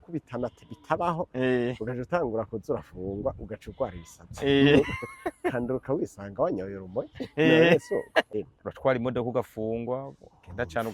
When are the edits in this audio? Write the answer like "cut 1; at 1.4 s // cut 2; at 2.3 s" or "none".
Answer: cut 1; at 8.3 s

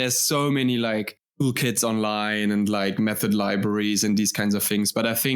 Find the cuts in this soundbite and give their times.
cut 1; at 1.2 s

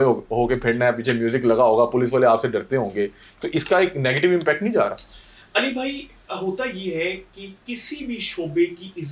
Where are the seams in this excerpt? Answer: none

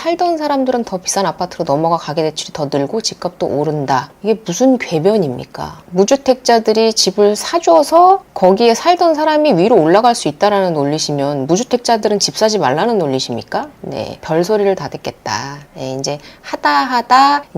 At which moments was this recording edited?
cut 1; at 4.1 s // cut 2; at 5.9 s // cut 3; at 14.2 s

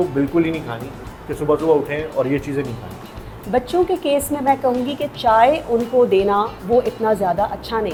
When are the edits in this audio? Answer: none

